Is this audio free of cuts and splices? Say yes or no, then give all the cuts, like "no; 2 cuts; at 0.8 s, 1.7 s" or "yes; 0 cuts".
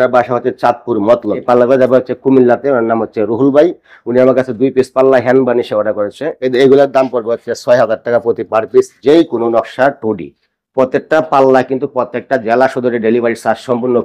no; 2 cuts; at 1.4 s, 6.3 s